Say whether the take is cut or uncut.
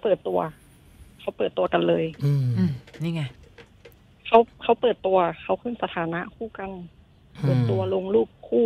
uncut